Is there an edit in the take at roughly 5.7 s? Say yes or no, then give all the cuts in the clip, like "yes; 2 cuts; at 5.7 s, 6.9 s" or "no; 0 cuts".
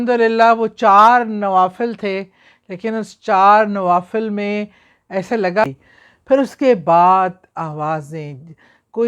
yes; 1 cut; at 5.7 s